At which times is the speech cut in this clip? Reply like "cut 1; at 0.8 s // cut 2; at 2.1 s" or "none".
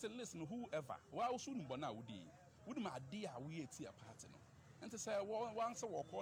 none